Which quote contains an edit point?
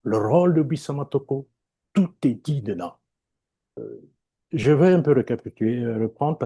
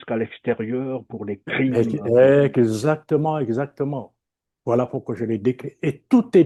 first; 1 cut; at 3.8 s

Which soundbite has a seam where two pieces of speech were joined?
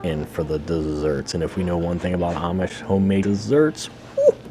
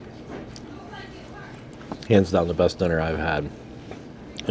first; 1 cut; at 3.2 s

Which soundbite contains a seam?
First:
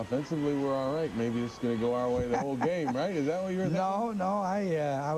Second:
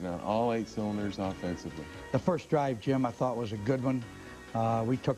second; 1 cut; at 3.9 s

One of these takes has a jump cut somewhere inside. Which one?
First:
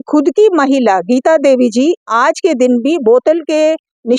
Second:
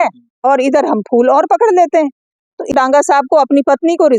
second; 1 cut; at 2.7 s

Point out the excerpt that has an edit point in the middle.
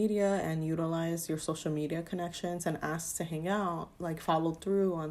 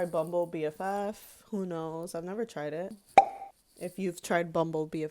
second; 1 cut; at 3.0 s

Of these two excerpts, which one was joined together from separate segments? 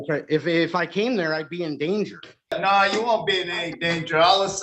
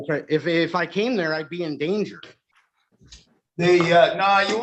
first; 1 cut; at 2.5 s

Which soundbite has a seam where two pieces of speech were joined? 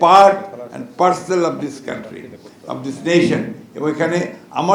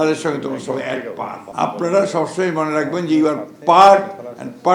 second; 1 cut; at 1.4 s

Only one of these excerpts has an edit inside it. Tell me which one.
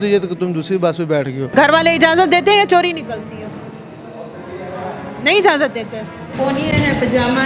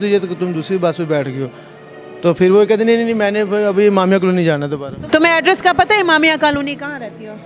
first; 2 cuts; at 1.5 s, 6.2 s

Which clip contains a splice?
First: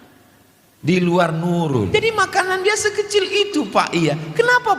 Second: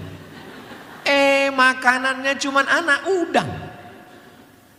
first; 1 cut; at 1.9 s

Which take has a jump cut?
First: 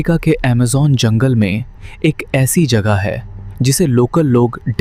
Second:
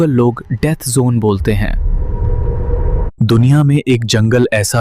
second; 1 cut; at 3.0 s

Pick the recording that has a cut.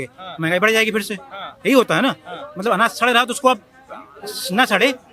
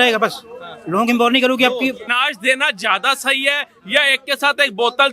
second; 1 cut; at 2.1 s

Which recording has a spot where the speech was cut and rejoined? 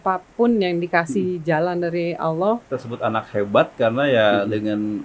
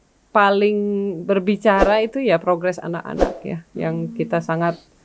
first; 1 cut; at 2.7 s

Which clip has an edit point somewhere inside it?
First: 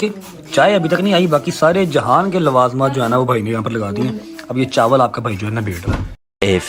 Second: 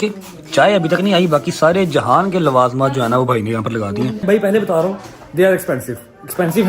second; 1 cut; at 4.2 s

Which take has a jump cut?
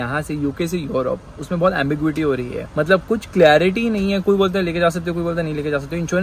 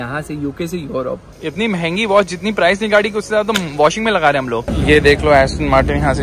second; 2 cuts; at 1.4 s, 4.7 s

